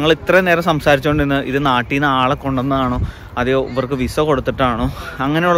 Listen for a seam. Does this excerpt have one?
no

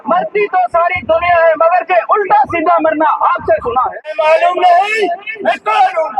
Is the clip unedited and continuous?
no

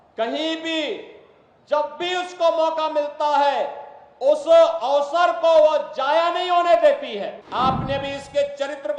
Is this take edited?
yes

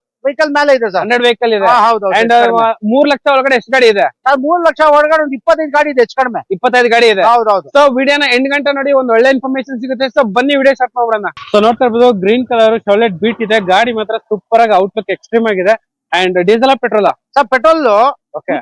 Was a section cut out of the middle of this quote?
yes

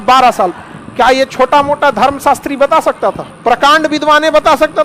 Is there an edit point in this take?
no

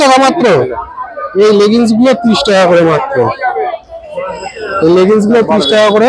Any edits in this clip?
no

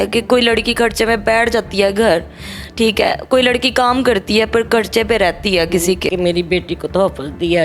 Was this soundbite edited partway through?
yes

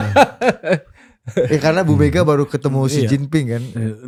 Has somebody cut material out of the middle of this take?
no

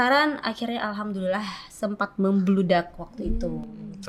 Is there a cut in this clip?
no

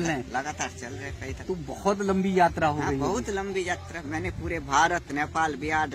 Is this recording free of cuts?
yes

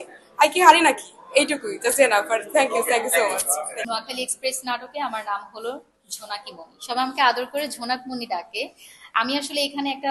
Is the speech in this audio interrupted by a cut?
no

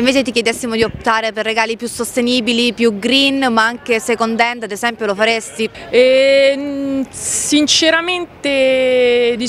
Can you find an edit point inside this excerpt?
no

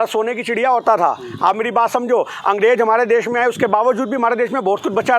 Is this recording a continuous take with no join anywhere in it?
yes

